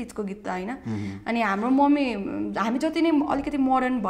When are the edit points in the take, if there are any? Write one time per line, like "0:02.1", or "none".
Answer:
none